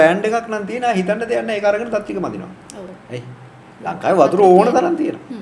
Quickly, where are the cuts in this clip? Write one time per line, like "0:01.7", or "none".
0:03.0